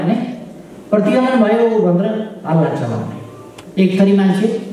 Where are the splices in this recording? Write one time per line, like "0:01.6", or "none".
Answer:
0:03.7